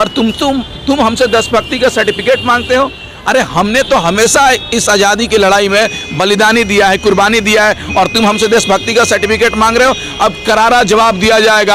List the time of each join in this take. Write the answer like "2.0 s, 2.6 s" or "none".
none